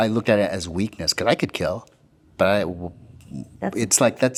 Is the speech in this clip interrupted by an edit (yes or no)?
no